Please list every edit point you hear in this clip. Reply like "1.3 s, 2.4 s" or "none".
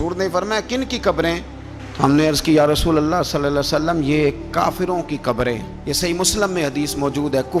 none